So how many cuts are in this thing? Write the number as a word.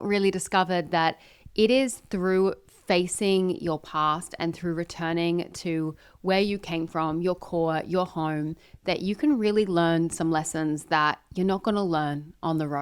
zero